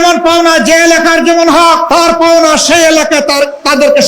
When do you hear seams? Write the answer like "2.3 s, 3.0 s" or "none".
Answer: 1.8 s